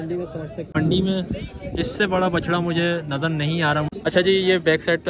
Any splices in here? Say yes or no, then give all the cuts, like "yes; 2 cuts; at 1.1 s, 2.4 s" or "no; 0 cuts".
yes; 2 cuts; at 0.7 s, 3.9 s